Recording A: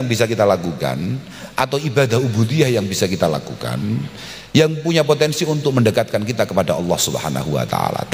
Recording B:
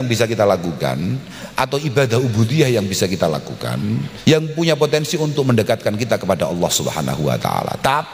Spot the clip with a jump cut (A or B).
B